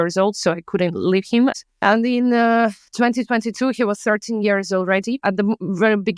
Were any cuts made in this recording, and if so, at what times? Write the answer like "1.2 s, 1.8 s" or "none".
1.7 s, 5.2 s